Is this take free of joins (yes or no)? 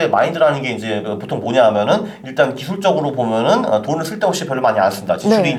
yes